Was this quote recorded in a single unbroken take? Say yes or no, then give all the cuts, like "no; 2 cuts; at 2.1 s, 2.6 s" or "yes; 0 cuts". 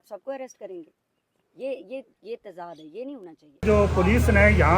no; 1 cut; at 3.6 s